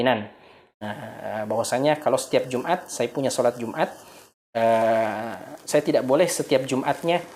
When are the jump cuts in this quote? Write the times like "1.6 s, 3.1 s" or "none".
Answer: none